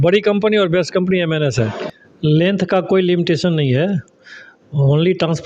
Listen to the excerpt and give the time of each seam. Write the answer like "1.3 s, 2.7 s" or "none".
1.8 s